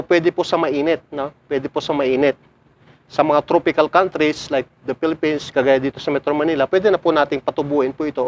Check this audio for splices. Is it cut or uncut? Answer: uncut